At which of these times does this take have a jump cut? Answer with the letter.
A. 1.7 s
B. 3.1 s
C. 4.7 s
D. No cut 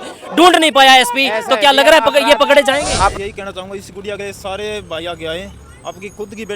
B